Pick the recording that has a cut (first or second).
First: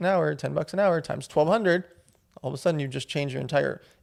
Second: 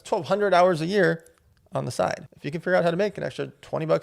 second